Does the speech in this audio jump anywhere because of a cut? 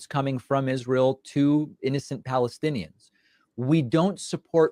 yes; 1 cut; at 3.1 s

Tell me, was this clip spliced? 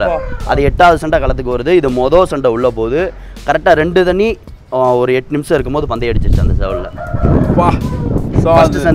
no; 0 cuts

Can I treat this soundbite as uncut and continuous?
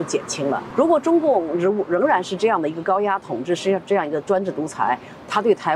yes; 0 cuts

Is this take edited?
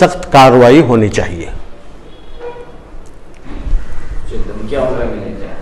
yes; 1 cut; at 3.5 s

